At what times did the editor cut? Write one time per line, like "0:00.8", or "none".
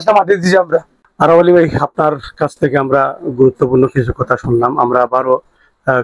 none